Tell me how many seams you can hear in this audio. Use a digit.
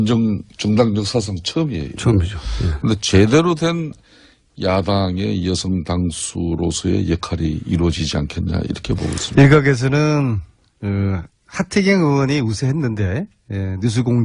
1